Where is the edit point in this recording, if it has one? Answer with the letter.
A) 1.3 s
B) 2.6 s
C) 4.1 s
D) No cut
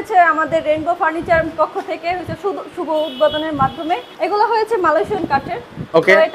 C